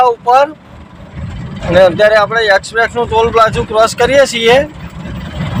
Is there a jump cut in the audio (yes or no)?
no